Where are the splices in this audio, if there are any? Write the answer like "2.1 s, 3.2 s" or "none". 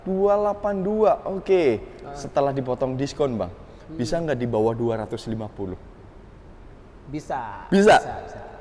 none